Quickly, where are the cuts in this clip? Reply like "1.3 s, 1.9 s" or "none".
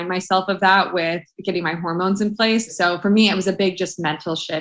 2.7 s